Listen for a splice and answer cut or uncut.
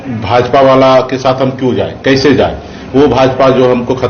uncut